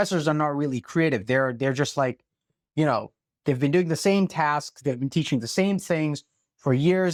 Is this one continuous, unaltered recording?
yes; 0 cuts

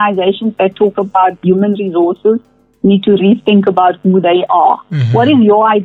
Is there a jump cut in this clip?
no; 0 cuts

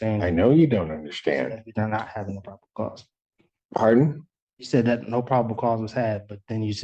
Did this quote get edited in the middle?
no; 0 cuts

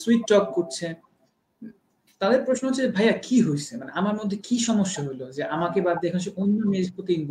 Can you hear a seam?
no; 0 cuts

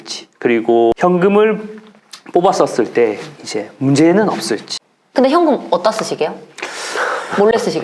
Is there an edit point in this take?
yes; 2 cuts; at 1.0 s, 4.6 s

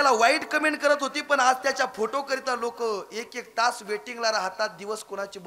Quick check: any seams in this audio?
no; 0 cuts

